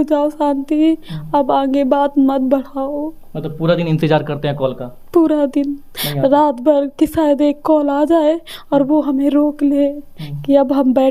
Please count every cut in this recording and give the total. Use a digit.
0